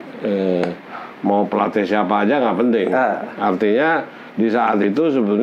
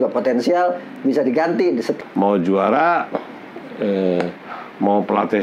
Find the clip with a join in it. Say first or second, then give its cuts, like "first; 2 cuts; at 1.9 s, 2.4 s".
second; 1 cut; at 1.9 s